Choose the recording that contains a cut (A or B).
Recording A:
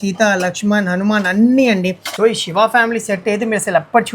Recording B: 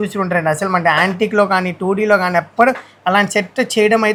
A